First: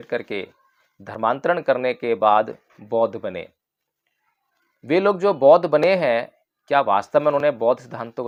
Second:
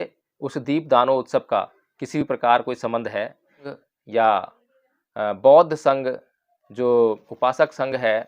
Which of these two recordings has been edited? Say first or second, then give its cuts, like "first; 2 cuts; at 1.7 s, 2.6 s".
second; 1 cut; at 3.7 s